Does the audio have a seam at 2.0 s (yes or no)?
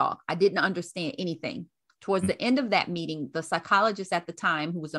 no